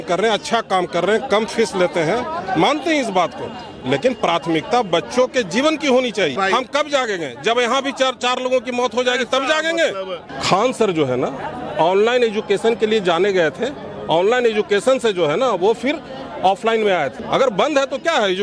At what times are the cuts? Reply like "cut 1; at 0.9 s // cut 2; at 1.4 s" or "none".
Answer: cut 1; at 6.4 s // cut 2; at 10.3 s // cut 3; at 17.2 s